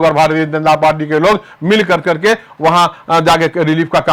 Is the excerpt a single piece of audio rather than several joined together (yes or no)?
yes